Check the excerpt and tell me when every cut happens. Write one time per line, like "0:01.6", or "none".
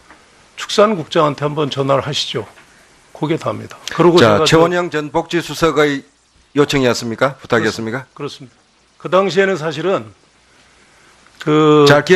0:01.4